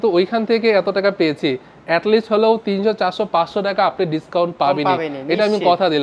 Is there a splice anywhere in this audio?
no; 0 cuts

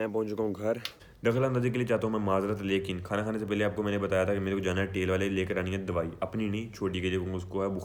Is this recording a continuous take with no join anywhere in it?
yes; 0 cuts

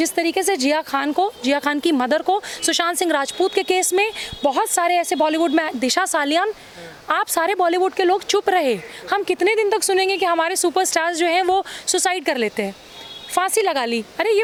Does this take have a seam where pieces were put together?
no; 0 cuts

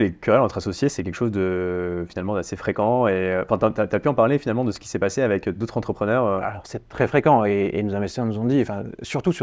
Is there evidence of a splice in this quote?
no; 0 cuts

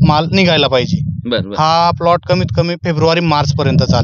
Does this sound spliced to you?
no; 0 cuts

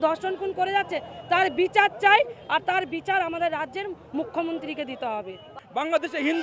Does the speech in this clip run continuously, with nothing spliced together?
no; 1 cut; at 5.5 s

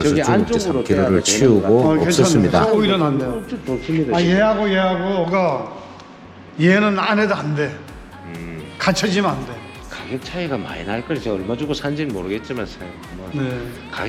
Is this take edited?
no; 0 cuts

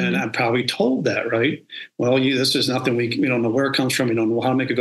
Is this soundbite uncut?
yes; 0 cuts

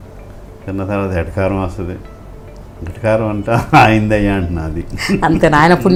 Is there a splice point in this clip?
no; 0 cuts

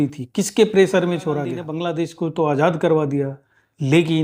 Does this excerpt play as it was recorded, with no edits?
no; 1 cut; at 1.7 s

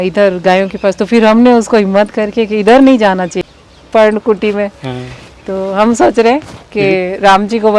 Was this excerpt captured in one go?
no; 1 cut; at 3.4 s

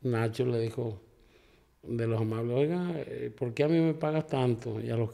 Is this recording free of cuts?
yes; 0 cuts

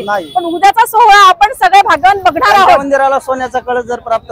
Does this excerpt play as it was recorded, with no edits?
no; 1 cut; at 2.8 s

